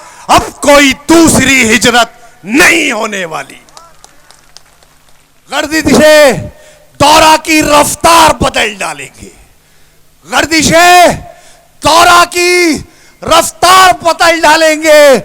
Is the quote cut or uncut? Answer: cut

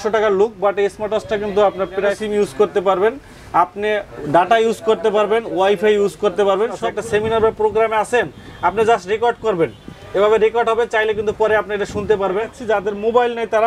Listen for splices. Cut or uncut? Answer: cut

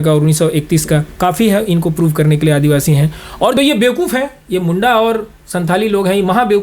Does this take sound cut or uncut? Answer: cut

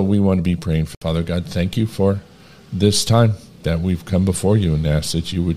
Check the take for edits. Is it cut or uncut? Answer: cut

